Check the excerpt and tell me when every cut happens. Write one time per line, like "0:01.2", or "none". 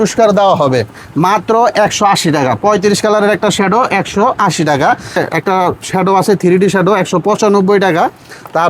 0:01.0
0:05.2